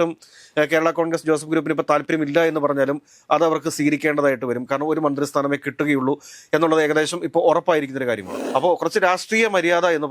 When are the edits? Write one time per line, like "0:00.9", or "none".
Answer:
0:08.3